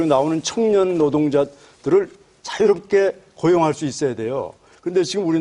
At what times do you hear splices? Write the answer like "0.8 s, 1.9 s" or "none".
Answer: none